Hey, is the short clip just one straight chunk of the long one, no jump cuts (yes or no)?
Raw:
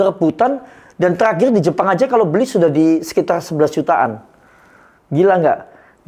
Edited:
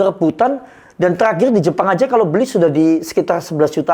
yes